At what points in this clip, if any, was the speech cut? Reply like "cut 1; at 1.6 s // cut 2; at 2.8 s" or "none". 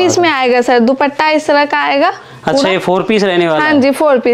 none